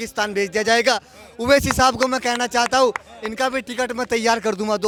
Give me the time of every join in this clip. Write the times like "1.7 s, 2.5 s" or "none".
none